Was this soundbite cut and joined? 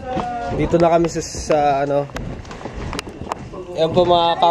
no; 0 cuts

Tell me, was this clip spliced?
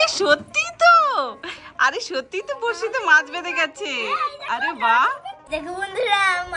yes; 1 cut; at 5.4 s

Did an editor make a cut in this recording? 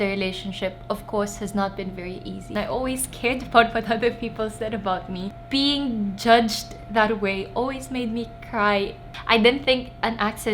yes; 3 cuts; at 2.5 s, 5.3 s, 9.2 s

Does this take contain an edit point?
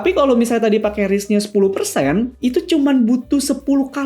yes; 1 cut; at 2.3 s

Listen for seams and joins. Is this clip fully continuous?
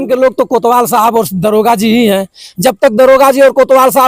yes; 0 cuts

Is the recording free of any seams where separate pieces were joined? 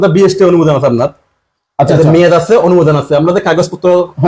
yes; 0 cuts

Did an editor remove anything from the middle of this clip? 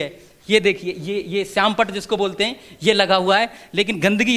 no; 0 cuts

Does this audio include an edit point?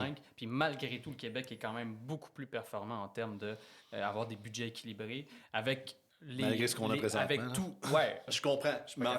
yes; 1 cut; at 8.3 s

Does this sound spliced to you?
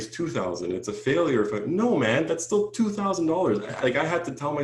no; 0 cuts

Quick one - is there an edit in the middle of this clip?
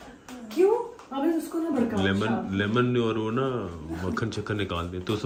no; 0 cuts

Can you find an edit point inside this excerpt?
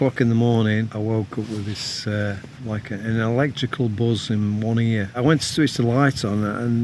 yes; 3 cuts; at 0.9 s, 2.5 s, 5.2 s

